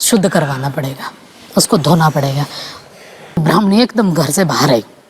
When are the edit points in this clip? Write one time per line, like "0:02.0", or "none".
0:03.4